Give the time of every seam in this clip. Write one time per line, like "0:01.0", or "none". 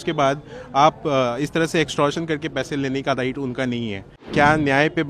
0:04.2